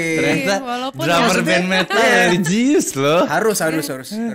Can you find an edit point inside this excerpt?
no; 0 cuts

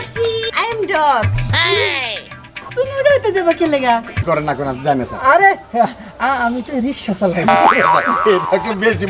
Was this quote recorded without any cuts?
no; 1 cut; at 4.1 s

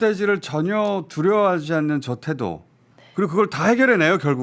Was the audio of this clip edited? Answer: no; 0 cuts

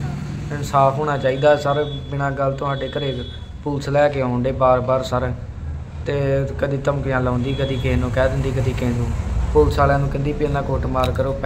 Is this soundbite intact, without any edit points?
yes; 0 cuts

